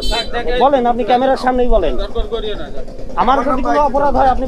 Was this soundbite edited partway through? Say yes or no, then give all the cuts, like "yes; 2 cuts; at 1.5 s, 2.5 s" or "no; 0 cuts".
no; 0 cuts